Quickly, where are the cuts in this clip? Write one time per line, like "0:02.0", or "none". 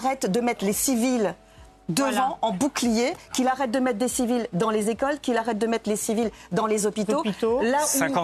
none

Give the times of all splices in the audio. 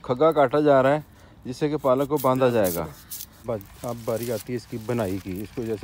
0:03.3

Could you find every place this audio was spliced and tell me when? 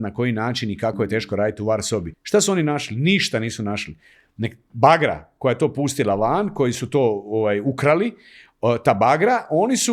0:02.1

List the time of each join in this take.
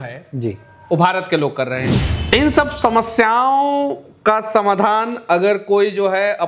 0:01.9

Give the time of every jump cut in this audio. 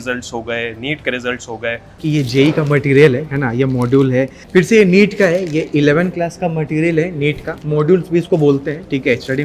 0:02.0
0:04.4

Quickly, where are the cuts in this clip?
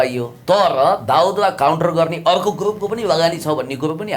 none

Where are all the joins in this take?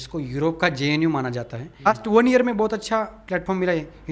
0:01.9

